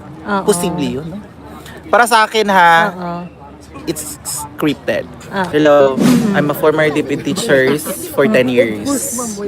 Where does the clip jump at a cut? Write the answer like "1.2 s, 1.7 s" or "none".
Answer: 5.5 s